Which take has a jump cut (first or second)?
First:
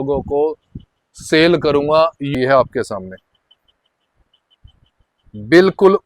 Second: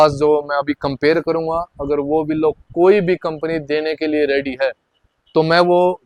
first